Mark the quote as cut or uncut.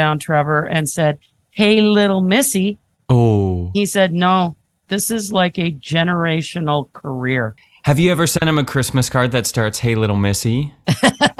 cut